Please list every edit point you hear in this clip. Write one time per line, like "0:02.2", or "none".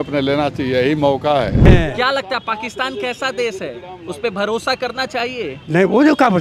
0:01.7